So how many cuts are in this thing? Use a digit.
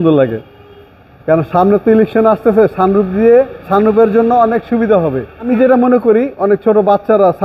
1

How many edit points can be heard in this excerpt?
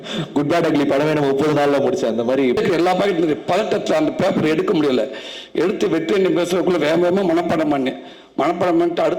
1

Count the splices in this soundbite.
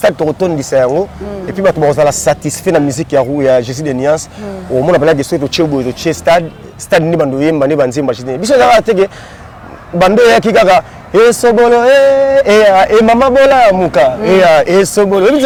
0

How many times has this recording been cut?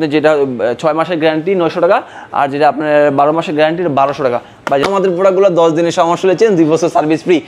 1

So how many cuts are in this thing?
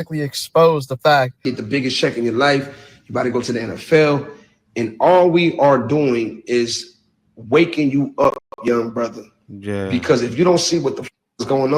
1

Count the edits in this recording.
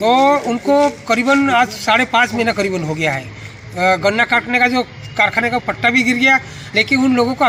0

